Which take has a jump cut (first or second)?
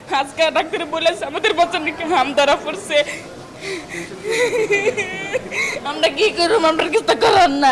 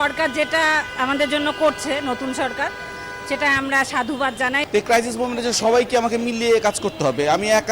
second